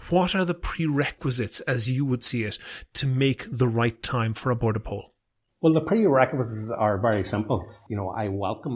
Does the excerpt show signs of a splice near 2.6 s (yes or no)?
no